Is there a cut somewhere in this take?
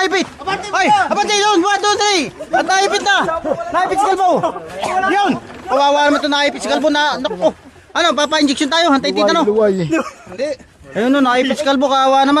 no; 0 cuts

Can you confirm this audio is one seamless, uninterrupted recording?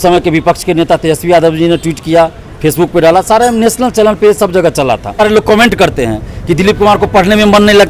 no; 1 cut; at 5.2 s

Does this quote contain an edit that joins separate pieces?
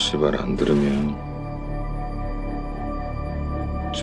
no; 0 cuts

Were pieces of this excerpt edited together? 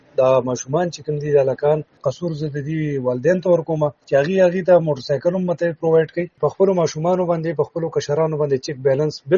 yes; 3 cuts; at 2.0 s, 4.0 s, 6.3 s

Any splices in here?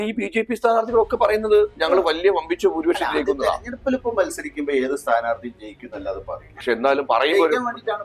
no; 0 cuts

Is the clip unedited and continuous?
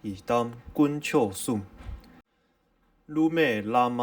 no; 1 cut; at 2.2 s

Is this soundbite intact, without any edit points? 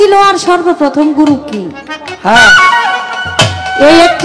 yes; 0 cuts

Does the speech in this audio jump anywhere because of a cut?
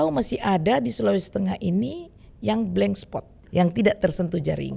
yes; 1 cut; at 3.4 s

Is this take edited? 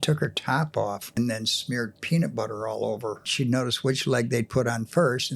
yes; 2 cuts; at 1.2 s, 3.3 s

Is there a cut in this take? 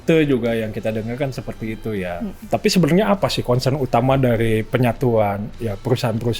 yes; 1 cut; at 2.4 s

